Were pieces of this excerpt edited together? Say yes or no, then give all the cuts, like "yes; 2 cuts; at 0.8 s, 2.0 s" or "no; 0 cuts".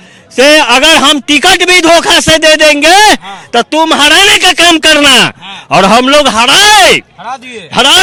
no; 0 cuts